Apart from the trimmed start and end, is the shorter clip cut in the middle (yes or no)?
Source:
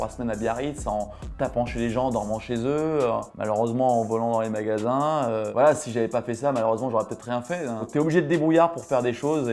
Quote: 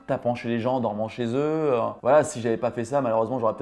yes